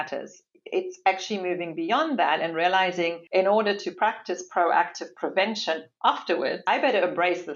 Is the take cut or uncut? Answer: cut